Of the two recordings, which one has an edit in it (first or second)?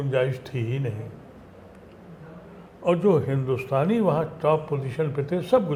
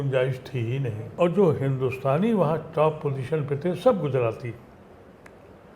second